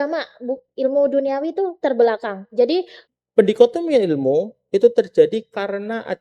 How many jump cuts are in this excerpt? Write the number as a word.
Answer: one